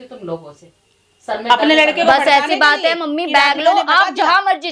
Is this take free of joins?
yes; 0 cuts

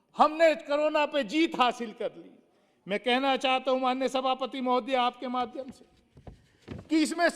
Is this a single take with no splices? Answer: yes; 0 cuts

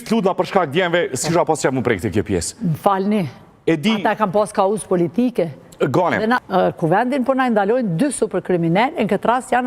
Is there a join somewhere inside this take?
yes; 1 cut; at 6.4 s

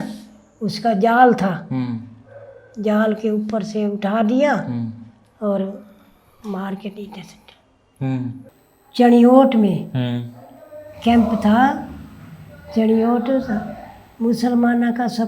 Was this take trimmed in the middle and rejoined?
yes; 1 cut; at 8.5 s

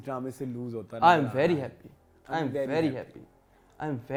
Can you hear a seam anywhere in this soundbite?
no; 0 cuts

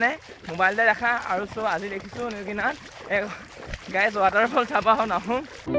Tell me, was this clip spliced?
no; 0 cuts

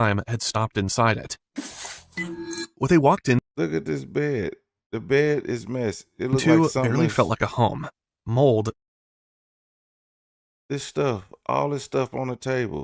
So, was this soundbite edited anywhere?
no; 0 cuts

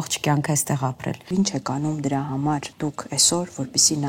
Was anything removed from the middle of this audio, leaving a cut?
yes; 2 cuts; at 1.3 s, 2.7 s

